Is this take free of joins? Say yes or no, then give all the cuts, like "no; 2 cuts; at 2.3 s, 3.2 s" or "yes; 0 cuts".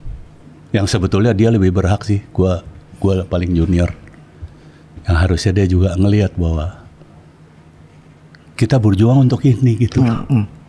yes; 0 cuts